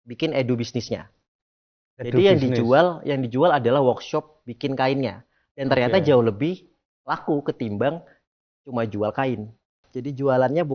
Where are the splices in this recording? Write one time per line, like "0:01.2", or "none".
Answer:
0:09.9